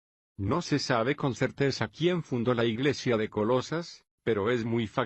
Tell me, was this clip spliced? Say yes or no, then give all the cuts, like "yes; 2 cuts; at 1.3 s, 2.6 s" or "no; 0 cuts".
yes; 1 cut; at 3.9 s